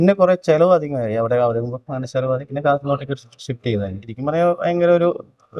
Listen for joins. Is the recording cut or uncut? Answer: cut